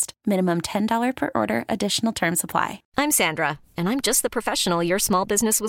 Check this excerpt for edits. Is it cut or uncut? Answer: cut